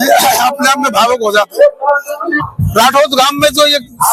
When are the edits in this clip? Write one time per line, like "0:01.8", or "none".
0:02.4